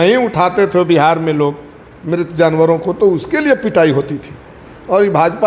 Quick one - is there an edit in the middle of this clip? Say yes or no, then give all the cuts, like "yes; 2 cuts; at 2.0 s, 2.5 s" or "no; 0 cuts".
no; 0 cuts